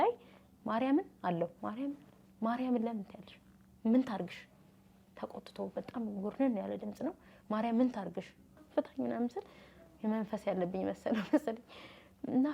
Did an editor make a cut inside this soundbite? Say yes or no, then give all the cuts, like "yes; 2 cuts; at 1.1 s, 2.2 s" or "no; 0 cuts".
yes; 1 cut; at 8.7 s